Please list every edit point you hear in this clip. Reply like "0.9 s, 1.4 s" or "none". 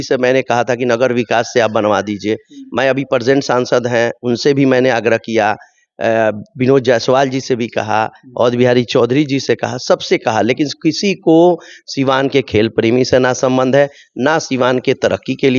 none